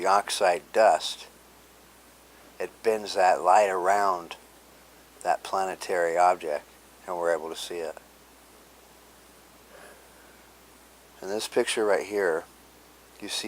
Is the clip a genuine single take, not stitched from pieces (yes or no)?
no